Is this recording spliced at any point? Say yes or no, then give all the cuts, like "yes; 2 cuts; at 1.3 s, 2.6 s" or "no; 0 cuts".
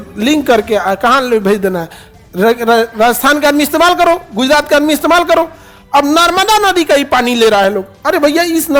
no; 0 cuts